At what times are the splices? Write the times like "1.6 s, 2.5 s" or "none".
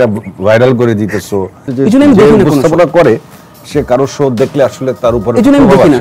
1.6 s